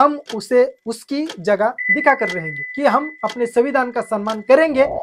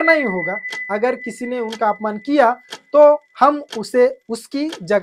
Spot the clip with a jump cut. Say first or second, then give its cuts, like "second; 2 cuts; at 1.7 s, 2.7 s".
first; 1 cut; at 2.6 s